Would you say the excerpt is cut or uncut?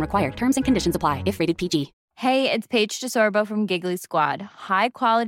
uncut